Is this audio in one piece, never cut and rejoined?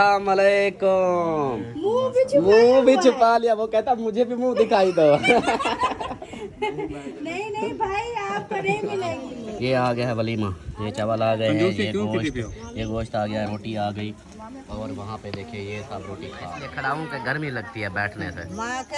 no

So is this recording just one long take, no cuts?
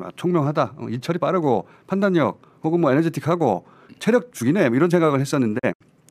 yes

